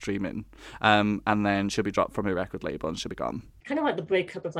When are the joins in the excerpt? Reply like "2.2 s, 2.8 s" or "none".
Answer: 3.5 s